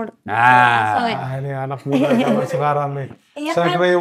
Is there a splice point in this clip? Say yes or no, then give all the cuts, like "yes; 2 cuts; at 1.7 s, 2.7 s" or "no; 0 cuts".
no; 0 cuts